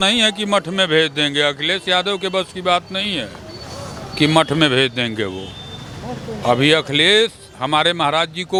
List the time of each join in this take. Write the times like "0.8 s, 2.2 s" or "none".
none